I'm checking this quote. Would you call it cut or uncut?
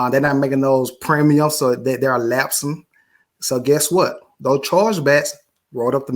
uncut